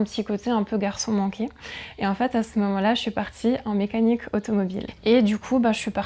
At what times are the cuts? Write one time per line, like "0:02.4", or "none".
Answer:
0:04.8